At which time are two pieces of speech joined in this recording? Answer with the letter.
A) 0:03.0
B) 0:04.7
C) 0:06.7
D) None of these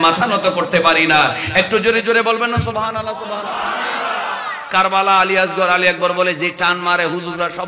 B